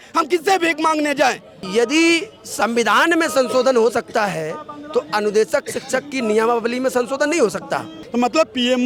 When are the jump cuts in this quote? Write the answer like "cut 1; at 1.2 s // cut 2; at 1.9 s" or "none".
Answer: cut 1; at 1.5 s // cut 2; at 8.0 s